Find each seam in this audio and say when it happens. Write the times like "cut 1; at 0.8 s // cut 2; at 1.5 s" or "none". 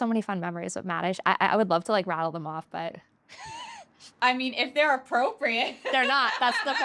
none